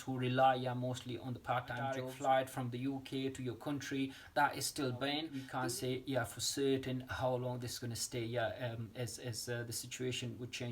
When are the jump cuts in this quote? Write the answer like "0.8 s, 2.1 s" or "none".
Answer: 2.1 s, 5.4 s